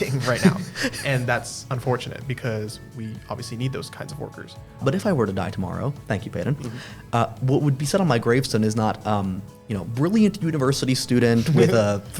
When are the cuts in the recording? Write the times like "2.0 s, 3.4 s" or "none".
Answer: 4.8 s